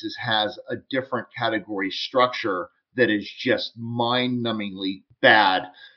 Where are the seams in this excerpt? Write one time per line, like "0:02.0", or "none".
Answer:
none